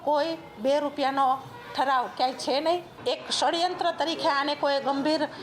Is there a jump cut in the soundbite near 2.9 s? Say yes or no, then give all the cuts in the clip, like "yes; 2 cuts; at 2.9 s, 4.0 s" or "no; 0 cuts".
yes; 1 cut; at 2.9 s